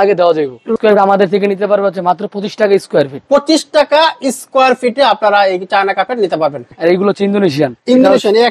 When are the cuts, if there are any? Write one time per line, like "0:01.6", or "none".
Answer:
0:00.7
0:06.7